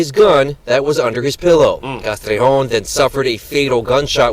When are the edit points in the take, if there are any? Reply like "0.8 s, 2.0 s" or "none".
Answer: 1.9 s

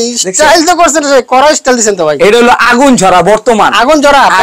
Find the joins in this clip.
none

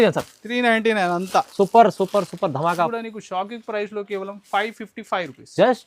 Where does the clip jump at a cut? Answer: 2.9 s

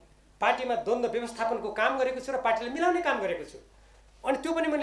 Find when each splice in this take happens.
none

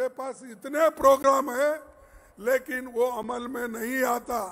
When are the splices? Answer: none

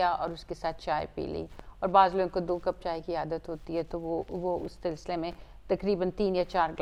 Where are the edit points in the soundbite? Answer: none

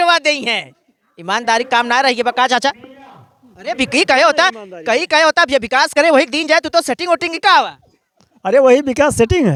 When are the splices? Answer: none

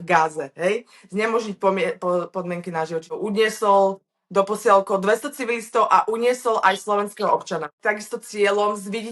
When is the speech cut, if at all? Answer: 3.0 s, 7.7 s

